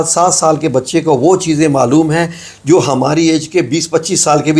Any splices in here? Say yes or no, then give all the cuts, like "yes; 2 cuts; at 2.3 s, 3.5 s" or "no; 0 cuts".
no; 0 cuts